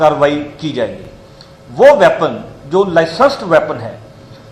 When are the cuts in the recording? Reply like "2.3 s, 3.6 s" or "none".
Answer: none